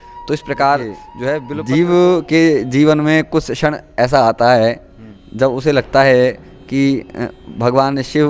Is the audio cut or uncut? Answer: cut